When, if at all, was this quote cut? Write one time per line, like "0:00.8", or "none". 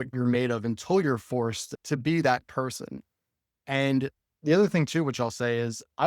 0:01.7